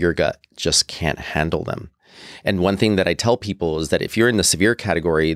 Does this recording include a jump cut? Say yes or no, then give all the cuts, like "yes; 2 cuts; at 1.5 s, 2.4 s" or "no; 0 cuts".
no; 0 cuts